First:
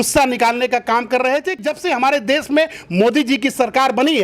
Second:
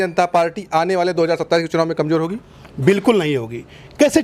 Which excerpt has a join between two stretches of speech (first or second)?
first